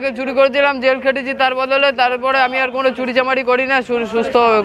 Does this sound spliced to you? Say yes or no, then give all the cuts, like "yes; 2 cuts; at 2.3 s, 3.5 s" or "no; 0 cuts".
no; 0 cuts